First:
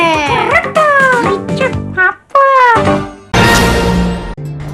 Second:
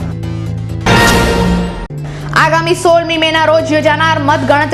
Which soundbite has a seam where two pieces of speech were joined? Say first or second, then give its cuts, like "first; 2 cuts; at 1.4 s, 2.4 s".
first; 1 cut; at 3.2 s